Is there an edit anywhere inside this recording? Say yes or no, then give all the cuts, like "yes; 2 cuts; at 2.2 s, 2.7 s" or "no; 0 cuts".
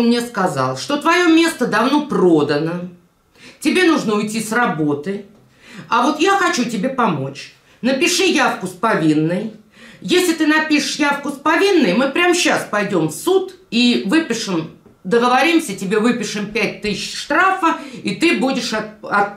no; 0 cuts